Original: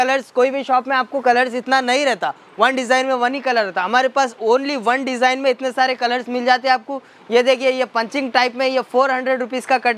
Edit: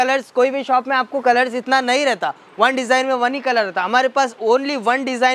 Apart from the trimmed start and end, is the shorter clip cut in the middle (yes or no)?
no